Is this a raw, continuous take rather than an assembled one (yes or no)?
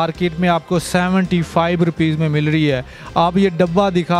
yes